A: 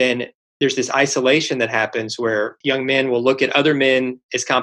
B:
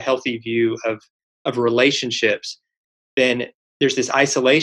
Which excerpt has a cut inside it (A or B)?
A